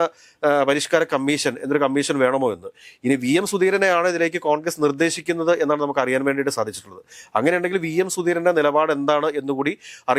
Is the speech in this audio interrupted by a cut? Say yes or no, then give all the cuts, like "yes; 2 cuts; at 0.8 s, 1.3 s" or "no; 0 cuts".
no; 0 cuts